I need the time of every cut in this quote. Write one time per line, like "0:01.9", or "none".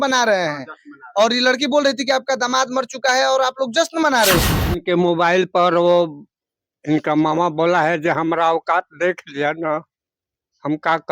0:04.6